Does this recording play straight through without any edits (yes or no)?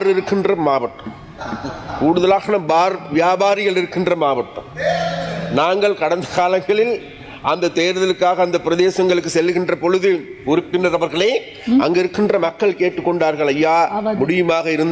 yes